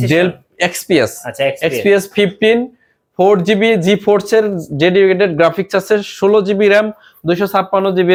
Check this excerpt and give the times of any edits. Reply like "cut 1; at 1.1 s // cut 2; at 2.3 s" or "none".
none